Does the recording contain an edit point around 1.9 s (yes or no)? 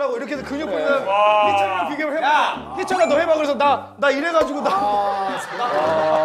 no